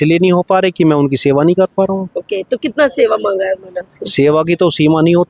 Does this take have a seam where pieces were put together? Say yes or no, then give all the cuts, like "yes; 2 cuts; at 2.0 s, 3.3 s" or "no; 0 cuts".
no; 0 cuts